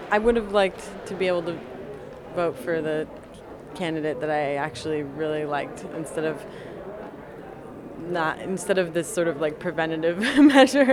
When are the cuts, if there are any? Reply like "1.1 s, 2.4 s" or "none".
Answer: none